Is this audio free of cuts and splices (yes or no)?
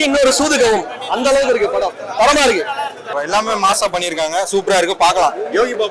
no